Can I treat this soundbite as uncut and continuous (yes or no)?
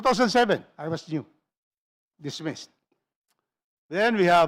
yes